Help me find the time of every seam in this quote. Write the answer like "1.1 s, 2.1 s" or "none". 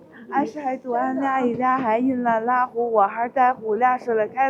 none